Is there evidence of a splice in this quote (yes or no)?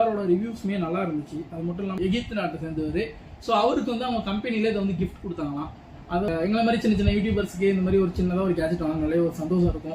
yes